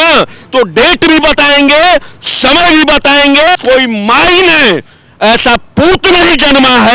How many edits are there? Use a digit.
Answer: 1